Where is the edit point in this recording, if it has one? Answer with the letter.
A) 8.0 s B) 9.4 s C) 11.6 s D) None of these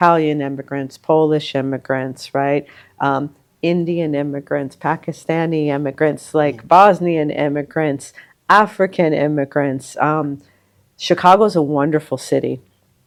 D